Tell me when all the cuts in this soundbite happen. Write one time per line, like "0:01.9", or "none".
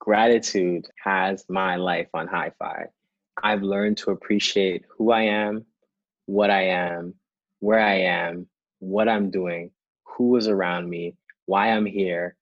0:00.9